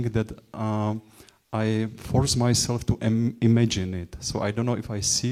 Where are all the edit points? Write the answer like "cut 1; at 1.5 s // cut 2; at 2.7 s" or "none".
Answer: none